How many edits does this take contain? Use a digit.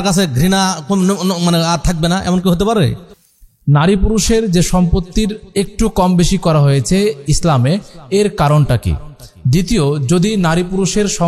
1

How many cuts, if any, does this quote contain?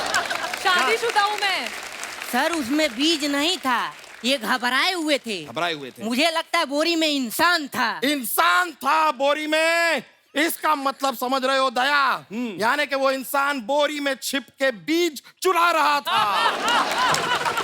1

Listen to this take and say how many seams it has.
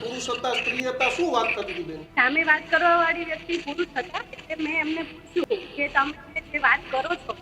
1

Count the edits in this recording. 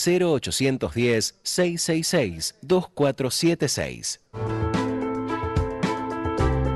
1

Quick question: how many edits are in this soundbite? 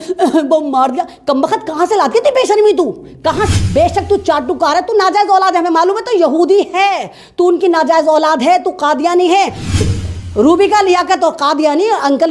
2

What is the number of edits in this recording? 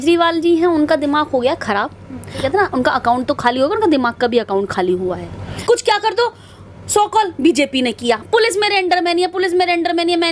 2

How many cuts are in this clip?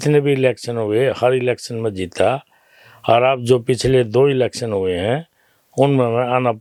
0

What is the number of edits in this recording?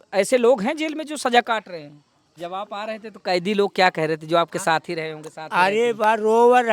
1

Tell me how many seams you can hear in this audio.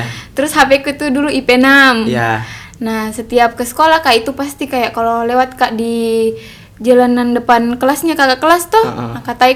0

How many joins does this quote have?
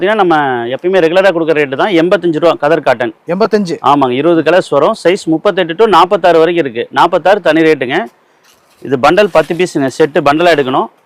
0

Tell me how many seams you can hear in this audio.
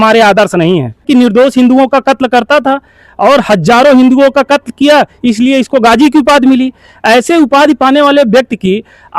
1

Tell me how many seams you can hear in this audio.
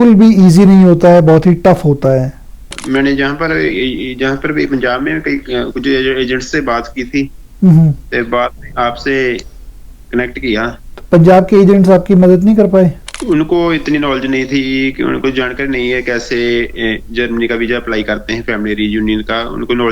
3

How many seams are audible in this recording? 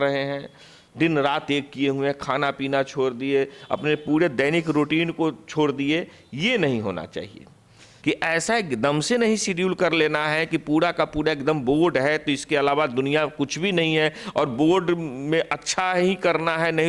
1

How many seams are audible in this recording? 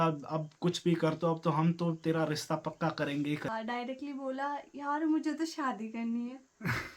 1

